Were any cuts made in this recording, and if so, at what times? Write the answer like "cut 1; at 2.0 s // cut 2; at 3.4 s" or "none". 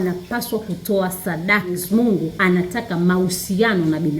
cut 1; at 1.8 s